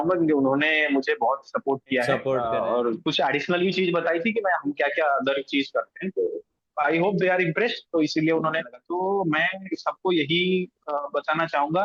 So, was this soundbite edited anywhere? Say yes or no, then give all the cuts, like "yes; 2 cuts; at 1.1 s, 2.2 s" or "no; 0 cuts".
yes; 2 cuts; at 2.4 s, 8.8 s